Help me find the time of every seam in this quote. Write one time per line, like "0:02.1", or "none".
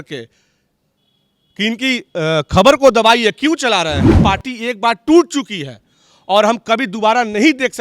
0:04.0